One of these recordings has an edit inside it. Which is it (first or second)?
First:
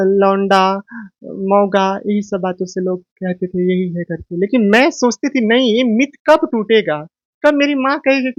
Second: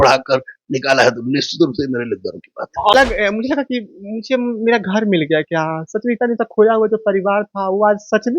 second